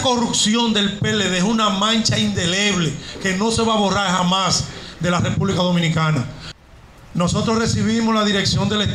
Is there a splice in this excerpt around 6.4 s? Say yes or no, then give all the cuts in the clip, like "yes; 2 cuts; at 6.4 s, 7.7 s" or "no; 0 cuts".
yes; 1 cut; at 6.4 s